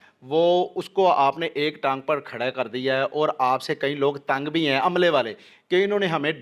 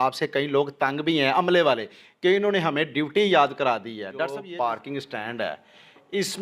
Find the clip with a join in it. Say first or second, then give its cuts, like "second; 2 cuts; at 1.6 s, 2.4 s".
second; 1 cut; at 4.4 s